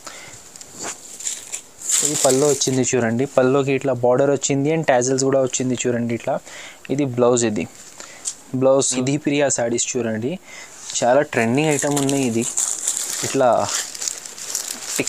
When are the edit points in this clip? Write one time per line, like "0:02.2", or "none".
0:09.0